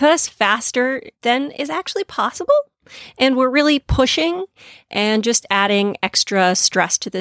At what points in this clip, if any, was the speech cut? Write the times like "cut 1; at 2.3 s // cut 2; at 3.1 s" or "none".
none